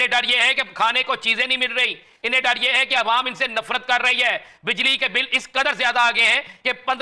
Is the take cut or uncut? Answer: uncut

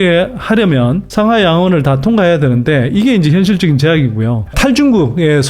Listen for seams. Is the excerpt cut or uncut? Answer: cut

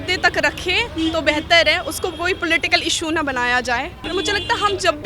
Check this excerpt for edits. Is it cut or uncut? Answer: cut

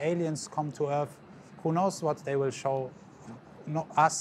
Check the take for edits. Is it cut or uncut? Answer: uncut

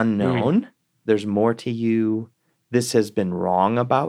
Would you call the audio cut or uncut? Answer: cut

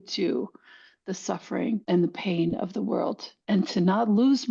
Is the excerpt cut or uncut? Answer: cut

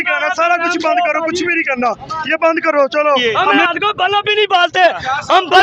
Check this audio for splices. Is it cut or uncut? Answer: cut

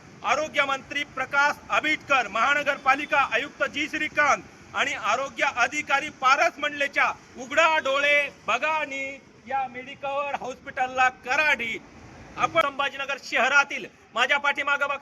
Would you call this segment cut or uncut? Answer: cut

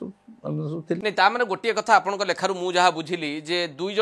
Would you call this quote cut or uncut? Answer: cut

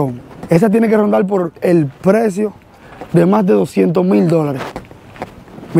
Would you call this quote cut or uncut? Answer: uncut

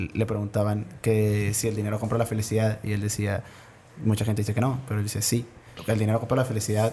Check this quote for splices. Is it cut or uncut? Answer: cut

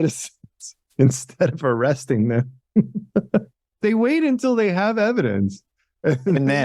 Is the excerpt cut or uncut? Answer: cut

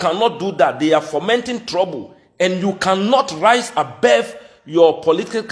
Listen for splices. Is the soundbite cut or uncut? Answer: uncut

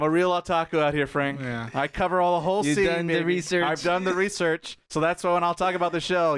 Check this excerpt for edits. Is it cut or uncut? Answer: cut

